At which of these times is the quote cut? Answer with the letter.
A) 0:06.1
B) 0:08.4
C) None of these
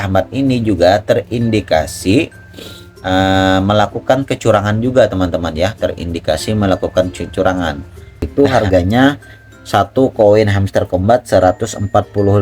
B